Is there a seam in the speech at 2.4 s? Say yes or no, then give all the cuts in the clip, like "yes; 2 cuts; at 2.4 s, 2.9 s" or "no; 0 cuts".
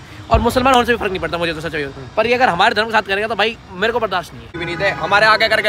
no; 1 cut; at 4.6 s